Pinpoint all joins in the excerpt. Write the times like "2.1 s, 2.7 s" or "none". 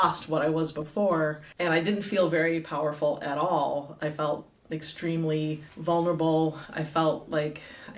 1.5 s, 5.7 s, 6.7 s